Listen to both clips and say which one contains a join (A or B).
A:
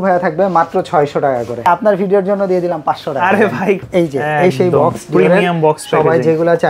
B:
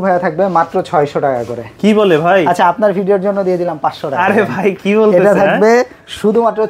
A